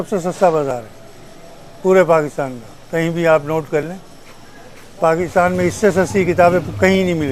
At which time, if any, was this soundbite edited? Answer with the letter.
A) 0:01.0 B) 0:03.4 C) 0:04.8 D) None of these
D